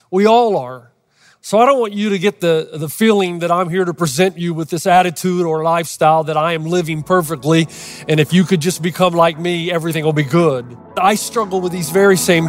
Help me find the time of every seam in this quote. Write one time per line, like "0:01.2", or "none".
0:11.0